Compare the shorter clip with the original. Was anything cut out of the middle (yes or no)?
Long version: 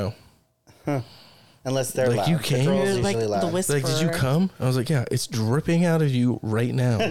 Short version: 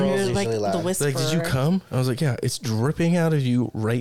no